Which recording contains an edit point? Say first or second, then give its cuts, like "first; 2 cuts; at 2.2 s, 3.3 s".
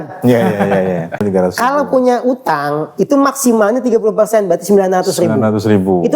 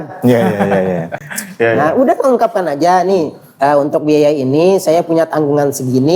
first; 1 cut; at 1.2 s